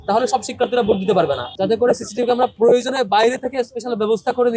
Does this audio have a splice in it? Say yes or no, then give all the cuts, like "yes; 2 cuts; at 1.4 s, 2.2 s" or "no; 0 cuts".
yes; 1 cut; at 1.5 s